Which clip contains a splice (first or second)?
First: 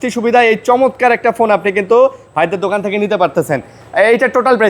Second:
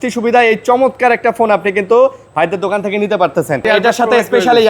second